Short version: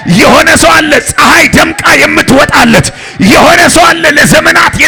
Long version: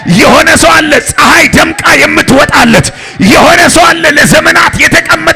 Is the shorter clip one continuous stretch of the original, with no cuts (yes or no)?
yes